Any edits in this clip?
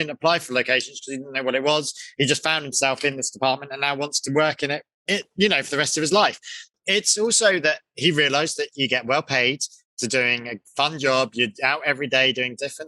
no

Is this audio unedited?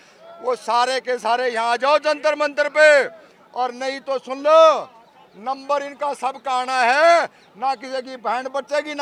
yes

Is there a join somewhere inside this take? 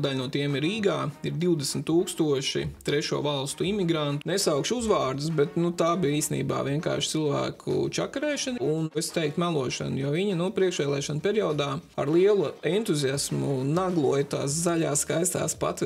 yes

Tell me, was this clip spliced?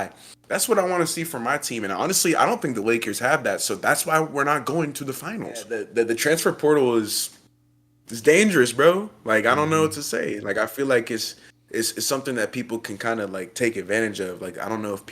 yes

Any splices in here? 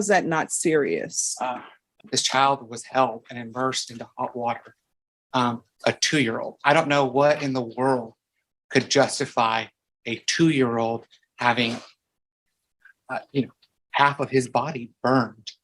yes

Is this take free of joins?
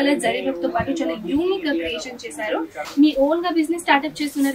no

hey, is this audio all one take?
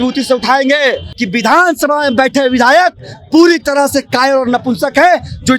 no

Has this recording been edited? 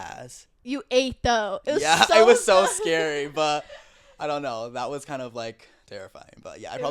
no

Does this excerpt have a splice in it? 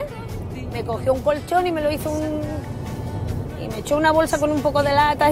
no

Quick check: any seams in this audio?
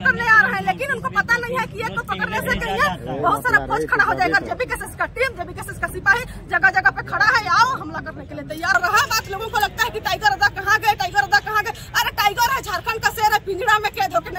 yes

